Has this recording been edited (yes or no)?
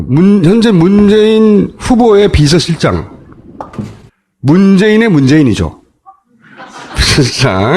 no